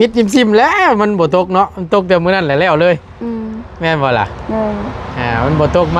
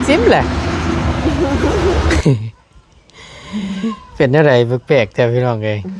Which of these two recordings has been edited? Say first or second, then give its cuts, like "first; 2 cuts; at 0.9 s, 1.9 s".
second; 1 cut; at 2.2 s